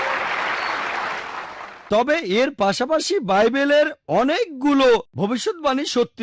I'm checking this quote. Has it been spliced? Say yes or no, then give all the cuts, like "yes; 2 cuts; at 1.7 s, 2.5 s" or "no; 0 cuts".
yes; 1 cut; at 1.8 s